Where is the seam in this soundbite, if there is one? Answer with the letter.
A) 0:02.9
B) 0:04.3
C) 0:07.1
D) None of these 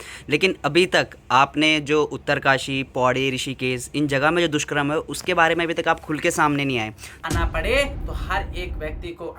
C